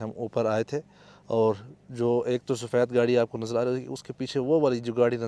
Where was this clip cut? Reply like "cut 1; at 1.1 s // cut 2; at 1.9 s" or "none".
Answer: none